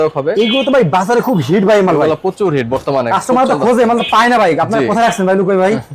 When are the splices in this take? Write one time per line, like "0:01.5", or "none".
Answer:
none